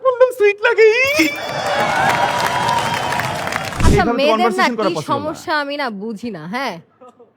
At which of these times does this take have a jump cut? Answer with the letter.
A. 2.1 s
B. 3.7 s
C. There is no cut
B